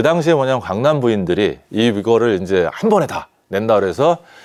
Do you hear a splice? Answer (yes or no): no